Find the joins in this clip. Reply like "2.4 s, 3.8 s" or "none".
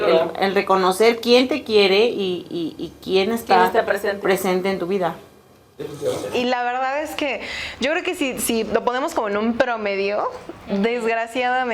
6.3 s